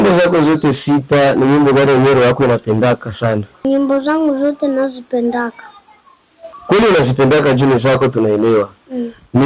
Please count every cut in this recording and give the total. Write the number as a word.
zero